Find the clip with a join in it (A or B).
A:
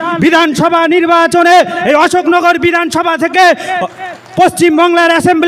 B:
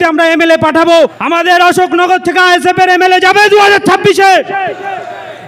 B